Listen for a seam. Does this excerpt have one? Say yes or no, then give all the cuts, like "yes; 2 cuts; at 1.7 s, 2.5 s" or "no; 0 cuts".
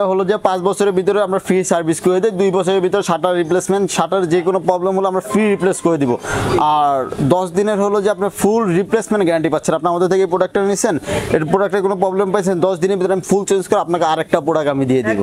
no; 0 cuts